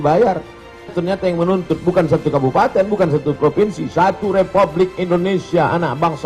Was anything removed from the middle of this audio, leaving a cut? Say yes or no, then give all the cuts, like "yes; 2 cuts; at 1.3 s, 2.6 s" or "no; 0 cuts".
yes; 1 cut; at 0.9 s